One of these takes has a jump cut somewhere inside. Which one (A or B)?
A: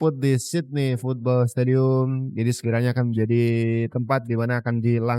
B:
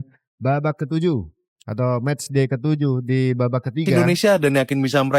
B